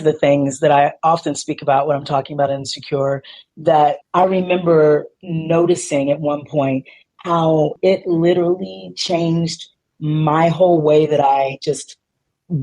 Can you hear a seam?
yes; 1 cut; at 7.7 s

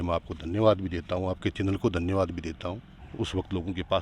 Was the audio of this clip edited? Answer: yes; 1 cut; at 3.0 s

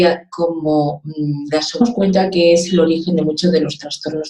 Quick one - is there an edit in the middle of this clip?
no; 0 cuts

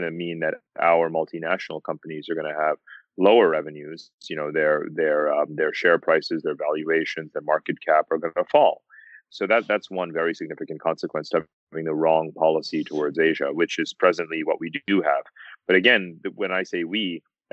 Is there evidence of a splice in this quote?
no; 0 cuts

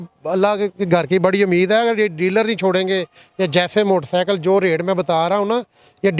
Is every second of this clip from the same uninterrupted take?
yes; 0 cuts

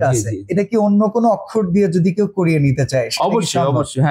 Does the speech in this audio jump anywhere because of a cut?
no; 0 cuts

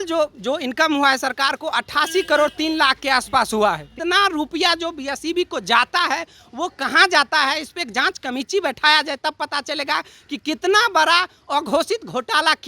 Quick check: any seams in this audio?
yes; 1 cut; at 3.9 s

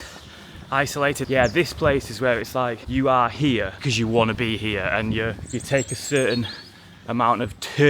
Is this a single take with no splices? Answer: no; 4 cuts; at 1.2 s, 2.8 s, 3.8 s, 5.5 s

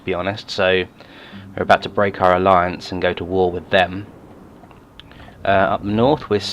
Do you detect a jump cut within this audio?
yes; 1 cut; at 0.9 s

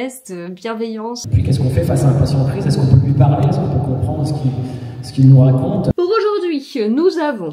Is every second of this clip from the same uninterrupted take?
no; 2 cuts; at 1.2 s, 5.9 s

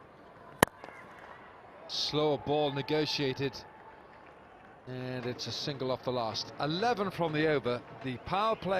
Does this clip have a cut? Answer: no; 0 cuts

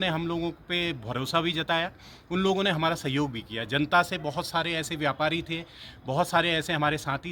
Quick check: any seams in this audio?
no; 0 cuts

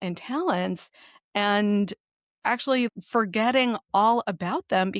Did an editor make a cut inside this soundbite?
yes; 1 cut; at 2.9 s

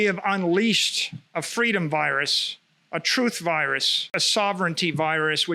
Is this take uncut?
no; 1 cut; at 4.1 s

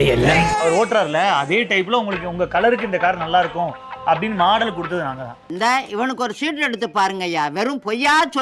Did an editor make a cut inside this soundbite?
no; 0 cuts

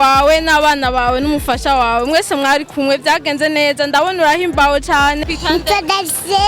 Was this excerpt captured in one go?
no; 1 cut; at 5.2 s

